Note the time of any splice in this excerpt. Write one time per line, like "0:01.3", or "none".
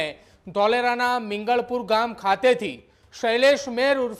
none